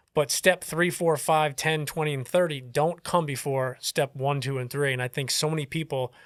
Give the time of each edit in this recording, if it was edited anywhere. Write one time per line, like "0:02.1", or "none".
none